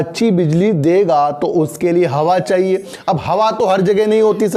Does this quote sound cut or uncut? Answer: uncut